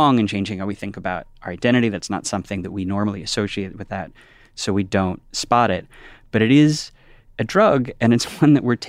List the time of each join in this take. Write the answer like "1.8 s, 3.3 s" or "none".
none

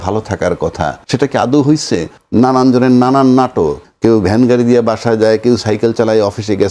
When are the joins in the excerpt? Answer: 1.0 s, 2.2 s, 3.8 s

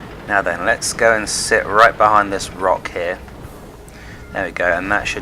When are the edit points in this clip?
2.8 s

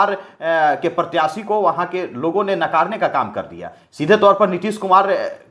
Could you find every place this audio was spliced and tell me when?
none

